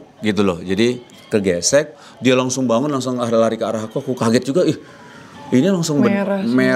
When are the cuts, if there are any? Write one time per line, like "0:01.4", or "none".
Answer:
none